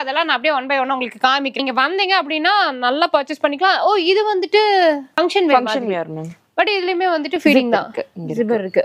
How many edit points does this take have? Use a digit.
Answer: 1